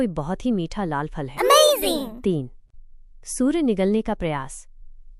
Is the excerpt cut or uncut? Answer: cut